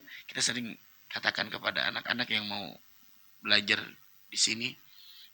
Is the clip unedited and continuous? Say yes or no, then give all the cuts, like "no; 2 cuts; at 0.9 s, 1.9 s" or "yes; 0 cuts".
yes; 0 cuts